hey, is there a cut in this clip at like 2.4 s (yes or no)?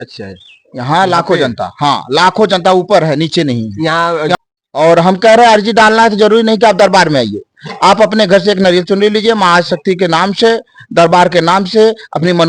no